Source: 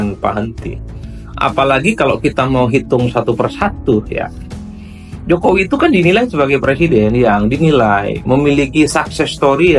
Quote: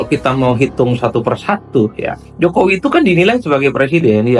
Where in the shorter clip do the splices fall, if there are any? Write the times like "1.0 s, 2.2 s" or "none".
2.2 s